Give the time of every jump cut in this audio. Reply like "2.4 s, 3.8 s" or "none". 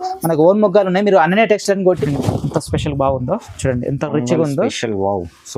2.0 s